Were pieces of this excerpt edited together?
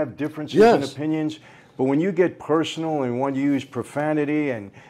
no; 0 cuts

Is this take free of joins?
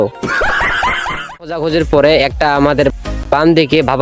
no; 1 cut; at 1.6 s

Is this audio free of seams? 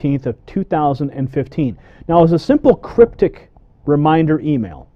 yes; 0 cuts

